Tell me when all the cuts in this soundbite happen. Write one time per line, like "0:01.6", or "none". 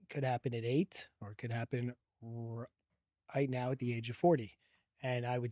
none